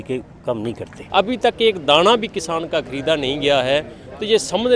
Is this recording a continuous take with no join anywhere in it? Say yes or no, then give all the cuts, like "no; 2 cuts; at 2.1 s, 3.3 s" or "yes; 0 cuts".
no; 1 cut; at 0.9 s